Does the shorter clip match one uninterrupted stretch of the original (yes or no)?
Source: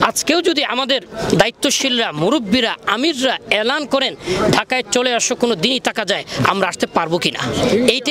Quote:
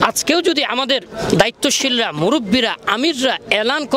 yes